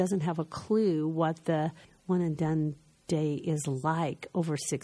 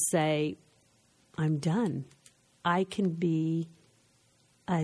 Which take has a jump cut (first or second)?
first